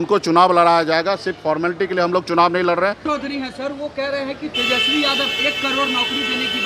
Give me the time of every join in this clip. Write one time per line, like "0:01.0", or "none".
0:03.0